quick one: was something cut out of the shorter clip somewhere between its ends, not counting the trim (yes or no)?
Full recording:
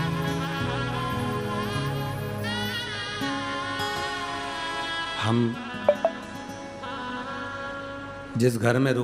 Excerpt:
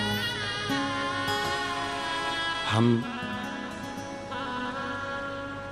no